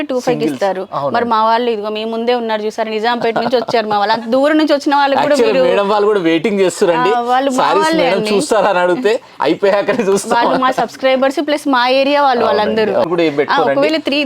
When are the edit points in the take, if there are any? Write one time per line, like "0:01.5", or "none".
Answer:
0:13.1

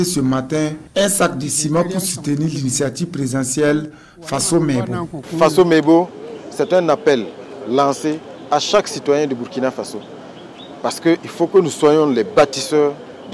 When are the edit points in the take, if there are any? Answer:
0:05.3

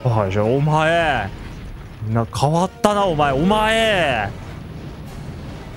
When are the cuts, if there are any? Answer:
none

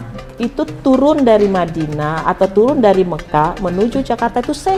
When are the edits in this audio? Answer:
none

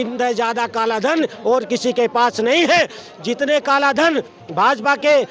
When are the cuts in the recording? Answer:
none

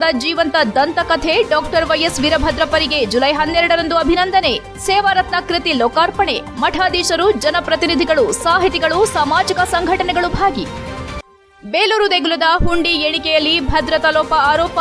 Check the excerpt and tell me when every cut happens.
none

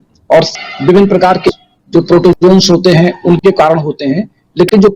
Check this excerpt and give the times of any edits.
0:01.7

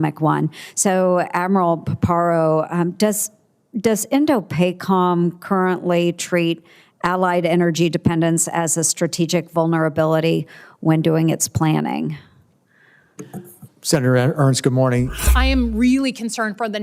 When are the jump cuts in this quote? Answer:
0:15.2

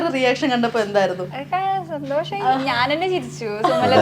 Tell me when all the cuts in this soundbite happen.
none

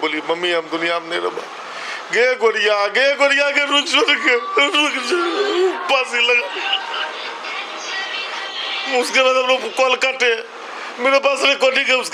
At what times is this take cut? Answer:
none

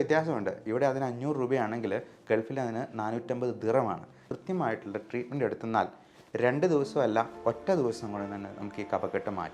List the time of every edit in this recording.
0:04.2

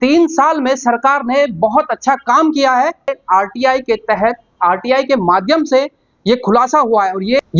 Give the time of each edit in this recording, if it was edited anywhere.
0:03.2

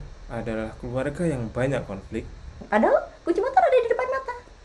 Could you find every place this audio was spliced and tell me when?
0:02.5

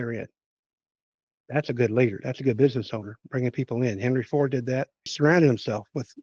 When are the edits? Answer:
0:05.1

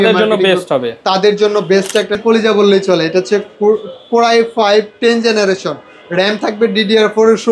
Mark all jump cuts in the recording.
0:02.1

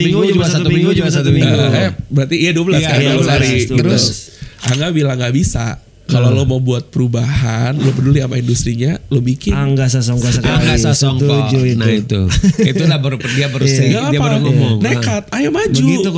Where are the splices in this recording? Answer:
none

